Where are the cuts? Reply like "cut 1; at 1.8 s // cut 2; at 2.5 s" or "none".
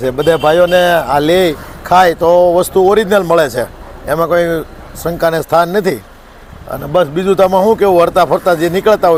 none